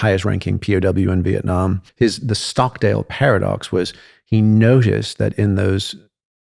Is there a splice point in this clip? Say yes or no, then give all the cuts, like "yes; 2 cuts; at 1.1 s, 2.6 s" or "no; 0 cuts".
yes; 1 cut; at 1.9 s